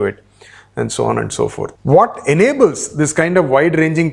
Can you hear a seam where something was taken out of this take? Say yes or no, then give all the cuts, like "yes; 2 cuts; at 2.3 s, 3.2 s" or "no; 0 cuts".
yes; 1 cut; at 1.8 s